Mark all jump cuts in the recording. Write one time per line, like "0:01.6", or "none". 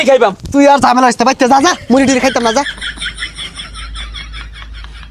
0:02.7